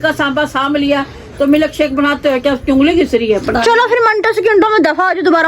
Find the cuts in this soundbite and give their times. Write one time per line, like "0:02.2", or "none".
0:03.4